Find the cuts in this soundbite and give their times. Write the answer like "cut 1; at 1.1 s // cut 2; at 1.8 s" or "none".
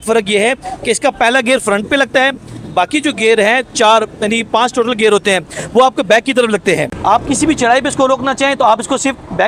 cut 1; at 6.9 s